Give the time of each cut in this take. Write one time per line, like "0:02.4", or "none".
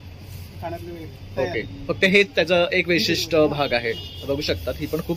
none